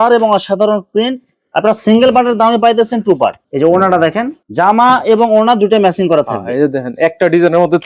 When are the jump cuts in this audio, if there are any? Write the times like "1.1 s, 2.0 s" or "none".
none